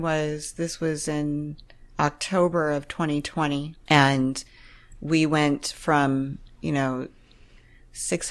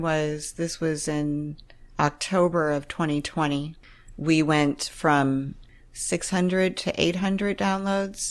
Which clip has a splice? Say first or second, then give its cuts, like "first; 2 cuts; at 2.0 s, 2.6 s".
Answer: second; 2 cuts; at 3.7 s, 5.6 s